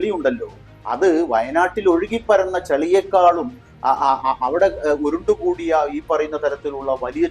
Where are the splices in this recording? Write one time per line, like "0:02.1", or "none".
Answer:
none